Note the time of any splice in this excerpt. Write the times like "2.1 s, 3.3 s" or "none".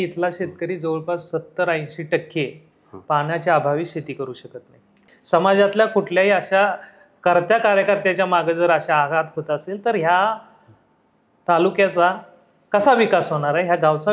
5.1 s